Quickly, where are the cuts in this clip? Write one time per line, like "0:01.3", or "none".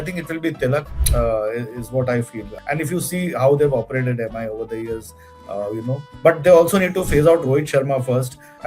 0:01.0
0:02.5